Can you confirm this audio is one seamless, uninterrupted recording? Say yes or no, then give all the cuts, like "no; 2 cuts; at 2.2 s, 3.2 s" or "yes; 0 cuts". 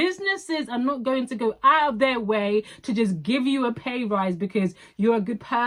yes; 0 cuts